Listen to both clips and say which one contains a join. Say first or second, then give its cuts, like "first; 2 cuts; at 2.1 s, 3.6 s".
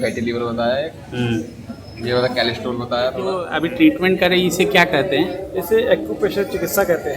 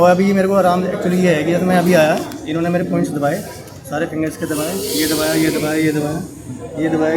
first; 1 cut; at 3.5 s